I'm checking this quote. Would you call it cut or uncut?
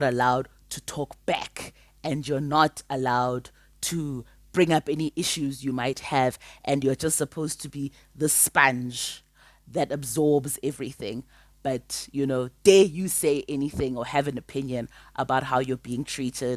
uncut